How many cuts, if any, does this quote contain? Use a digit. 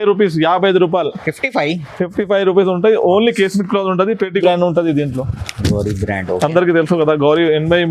1